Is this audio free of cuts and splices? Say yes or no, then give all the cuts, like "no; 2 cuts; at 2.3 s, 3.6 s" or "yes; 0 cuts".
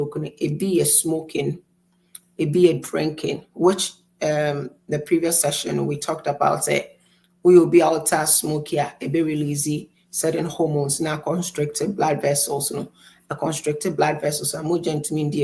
yes; 0 cuts